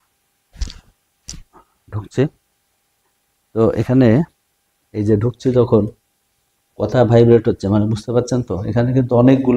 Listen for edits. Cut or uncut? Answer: uncut